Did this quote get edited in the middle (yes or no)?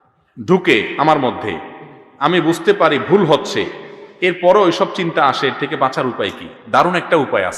no